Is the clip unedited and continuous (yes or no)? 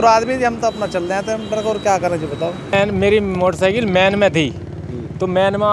no